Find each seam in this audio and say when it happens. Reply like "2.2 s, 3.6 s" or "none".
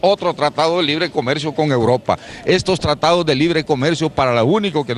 none